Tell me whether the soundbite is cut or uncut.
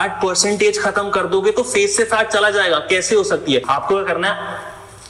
cut